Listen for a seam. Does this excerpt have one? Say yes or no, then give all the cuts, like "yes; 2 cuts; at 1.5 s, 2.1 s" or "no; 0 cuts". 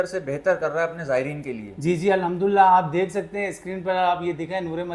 no; 0 cuts